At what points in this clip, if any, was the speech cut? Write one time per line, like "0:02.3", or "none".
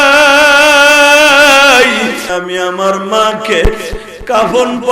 0:02.3